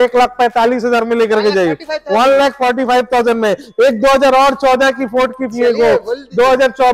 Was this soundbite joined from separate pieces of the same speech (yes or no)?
no